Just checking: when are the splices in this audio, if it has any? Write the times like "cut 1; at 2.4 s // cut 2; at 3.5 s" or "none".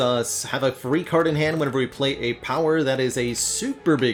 none